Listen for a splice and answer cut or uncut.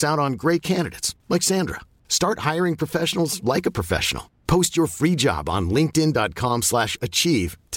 uncut